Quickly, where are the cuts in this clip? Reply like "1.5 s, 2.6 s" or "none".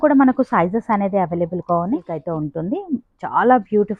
2.2 s